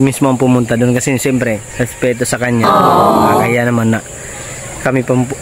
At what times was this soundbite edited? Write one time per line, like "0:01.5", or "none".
none